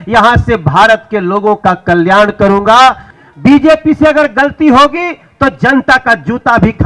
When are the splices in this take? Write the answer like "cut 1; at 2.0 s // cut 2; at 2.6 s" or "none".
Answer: cut 1; at 3.1 s

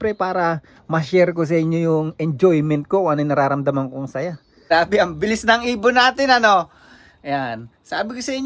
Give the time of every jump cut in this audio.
cut 1; at 4.5 s

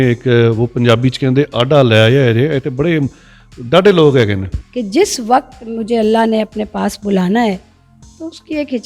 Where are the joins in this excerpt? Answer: cut 1; at 4.6 s

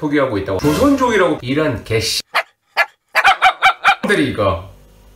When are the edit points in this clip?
cut 1; at 1.4 s

